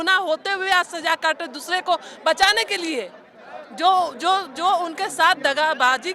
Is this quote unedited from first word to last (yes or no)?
yes